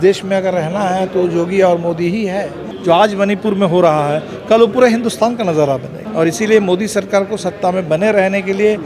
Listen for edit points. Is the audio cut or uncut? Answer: cut